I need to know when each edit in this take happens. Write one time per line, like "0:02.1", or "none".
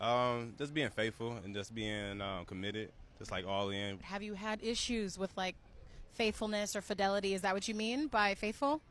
0:03.4